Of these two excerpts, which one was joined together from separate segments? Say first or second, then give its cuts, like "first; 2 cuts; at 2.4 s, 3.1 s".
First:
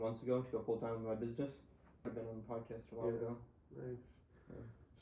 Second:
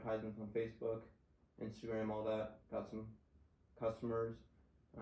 first; 1 cut; at 2.1 s